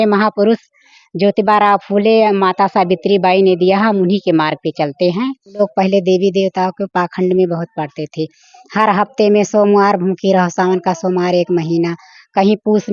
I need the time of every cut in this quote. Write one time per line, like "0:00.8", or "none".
0:05.6

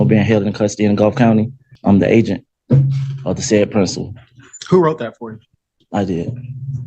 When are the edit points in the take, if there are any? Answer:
0:01.6

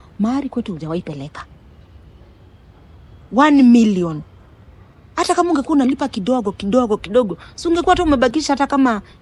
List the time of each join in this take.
none

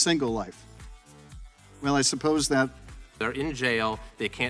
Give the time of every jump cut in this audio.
none

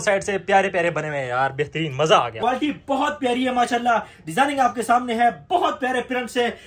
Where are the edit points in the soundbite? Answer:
0:02.4

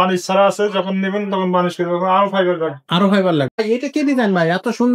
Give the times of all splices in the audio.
0:03.6

